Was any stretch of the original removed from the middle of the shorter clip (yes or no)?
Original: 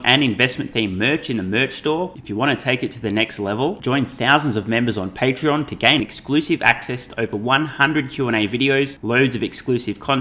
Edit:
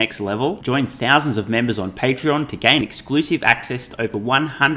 no